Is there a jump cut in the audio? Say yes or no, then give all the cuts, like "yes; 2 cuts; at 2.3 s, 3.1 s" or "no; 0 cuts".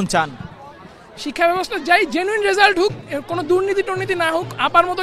no; 0 cuts